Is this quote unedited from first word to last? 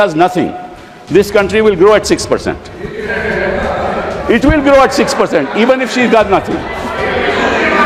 yes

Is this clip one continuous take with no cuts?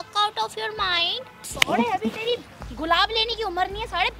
no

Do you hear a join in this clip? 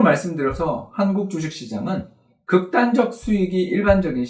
no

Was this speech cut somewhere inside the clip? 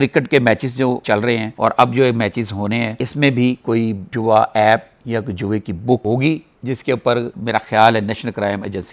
no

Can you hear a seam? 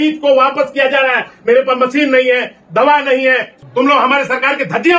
yes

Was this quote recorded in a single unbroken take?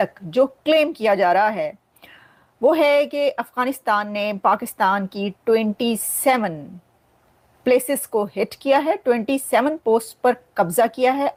yes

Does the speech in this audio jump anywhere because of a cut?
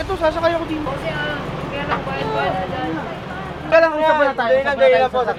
no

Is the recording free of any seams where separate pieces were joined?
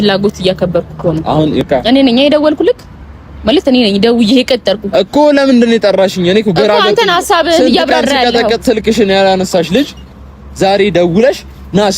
no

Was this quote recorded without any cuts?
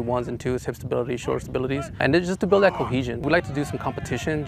no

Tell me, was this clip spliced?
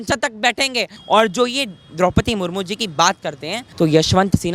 yes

